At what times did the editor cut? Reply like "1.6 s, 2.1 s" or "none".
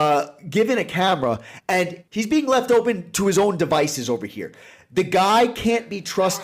1.5 s